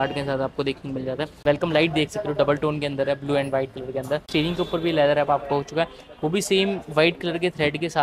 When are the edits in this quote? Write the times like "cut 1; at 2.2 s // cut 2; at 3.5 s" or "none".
cut 1; at 1.3 s // cut 2; at 4.3 s